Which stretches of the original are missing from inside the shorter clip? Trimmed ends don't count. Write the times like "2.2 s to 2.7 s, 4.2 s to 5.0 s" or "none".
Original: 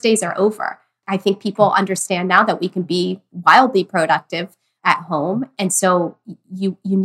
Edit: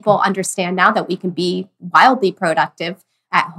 none